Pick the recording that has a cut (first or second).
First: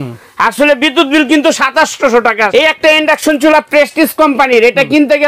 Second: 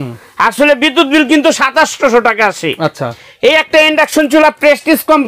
first